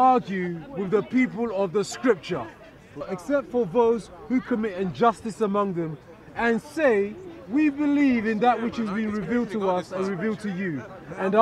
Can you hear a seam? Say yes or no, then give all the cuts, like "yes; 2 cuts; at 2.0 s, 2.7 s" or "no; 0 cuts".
yes; 1 cut; at 3.0 s